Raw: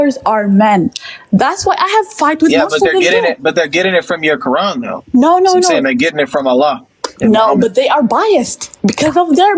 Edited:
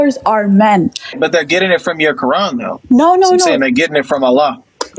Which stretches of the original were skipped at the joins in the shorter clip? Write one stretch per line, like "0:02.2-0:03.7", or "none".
0:01.1-0:03.4